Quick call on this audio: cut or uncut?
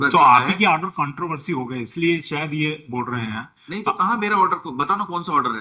uncut